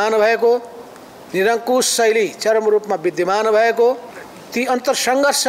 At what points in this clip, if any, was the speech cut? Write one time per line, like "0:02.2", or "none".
0:04.1

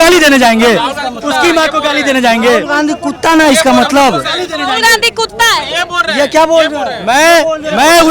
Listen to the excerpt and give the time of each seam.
none

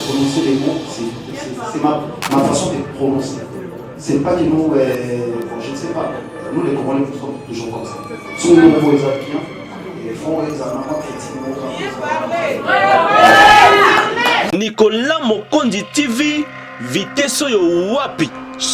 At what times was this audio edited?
0:14.4

